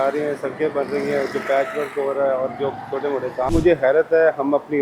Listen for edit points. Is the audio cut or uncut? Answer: cut